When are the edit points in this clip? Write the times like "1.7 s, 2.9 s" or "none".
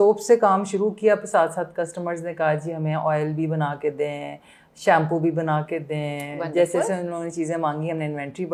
none